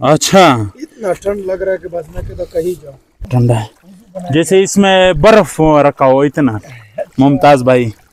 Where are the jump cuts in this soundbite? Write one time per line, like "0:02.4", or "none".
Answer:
0:03.3

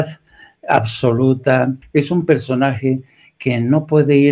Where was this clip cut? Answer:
0:01.8

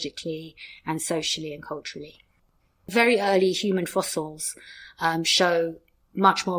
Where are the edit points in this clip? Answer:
0:02.9

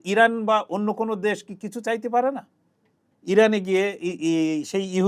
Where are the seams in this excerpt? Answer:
0:03.1

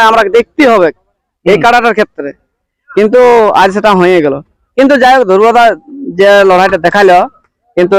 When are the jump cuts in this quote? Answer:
none

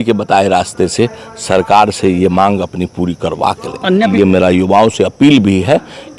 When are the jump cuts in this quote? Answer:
0:04.1

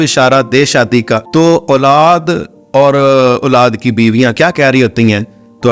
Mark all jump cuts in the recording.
0:01.2

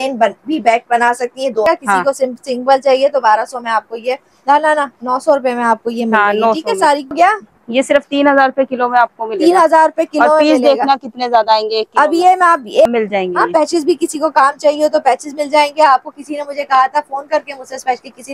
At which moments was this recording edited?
0:01.7
0:07.1
0:12.9

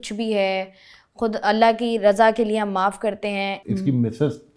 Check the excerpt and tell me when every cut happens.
0:03.6

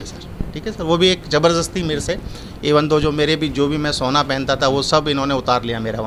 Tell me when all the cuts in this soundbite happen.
none

